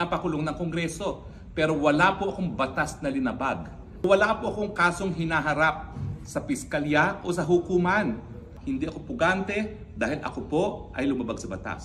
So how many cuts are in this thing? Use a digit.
2